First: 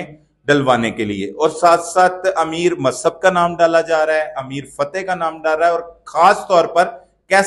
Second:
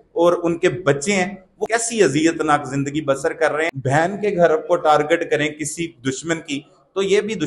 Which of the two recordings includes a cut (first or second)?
second